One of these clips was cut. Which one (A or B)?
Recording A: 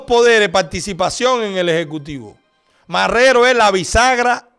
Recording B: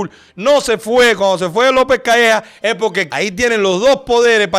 B